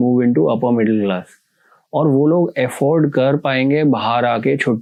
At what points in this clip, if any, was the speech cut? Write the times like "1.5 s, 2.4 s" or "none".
none